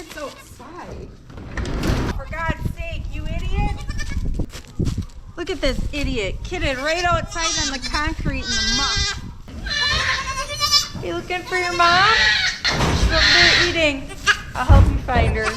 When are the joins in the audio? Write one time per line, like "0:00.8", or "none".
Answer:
0:02.1
0:04.5
0:09.5
0:12.6
0:14.4